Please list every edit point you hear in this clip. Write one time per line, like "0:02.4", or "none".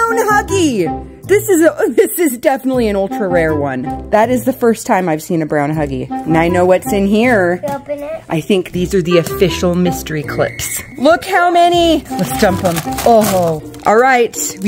0:04.0
0:06.0
0:10.8
0:12.1
0:13.7